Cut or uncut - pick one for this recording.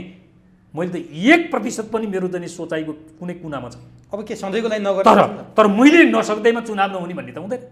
uncut